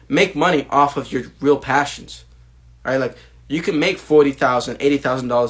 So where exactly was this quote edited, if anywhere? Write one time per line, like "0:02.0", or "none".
none